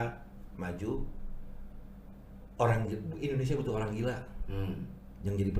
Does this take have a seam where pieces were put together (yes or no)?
no